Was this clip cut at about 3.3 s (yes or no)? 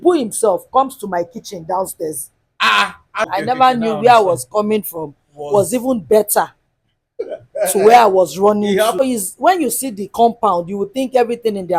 yes